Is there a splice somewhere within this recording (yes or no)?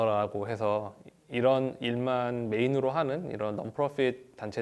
no